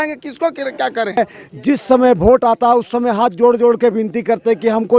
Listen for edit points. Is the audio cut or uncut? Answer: cut